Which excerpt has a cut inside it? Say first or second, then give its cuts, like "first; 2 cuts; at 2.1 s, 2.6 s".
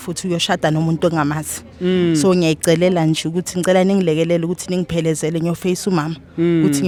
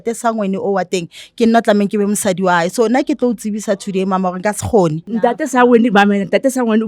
second; 1 cut; at 5.1 s